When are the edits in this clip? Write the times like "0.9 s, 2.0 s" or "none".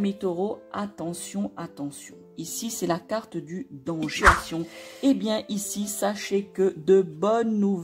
4.2 s